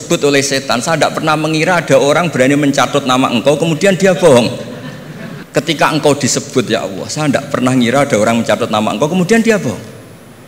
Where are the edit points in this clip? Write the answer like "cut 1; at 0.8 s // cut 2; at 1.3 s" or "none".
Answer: none